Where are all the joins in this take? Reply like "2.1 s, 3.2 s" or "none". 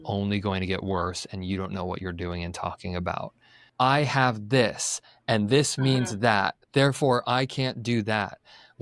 3.6 s